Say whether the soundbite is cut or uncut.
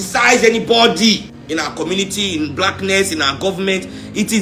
cut